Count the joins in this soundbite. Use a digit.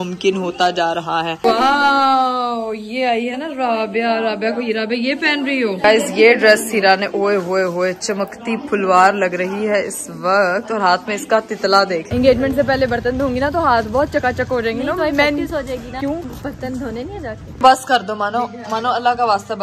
5